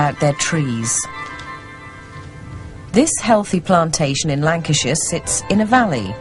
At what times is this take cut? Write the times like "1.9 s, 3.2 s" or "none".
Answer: 5.1 s